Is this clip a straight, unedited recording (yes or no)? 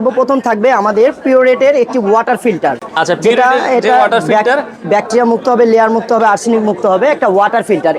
yes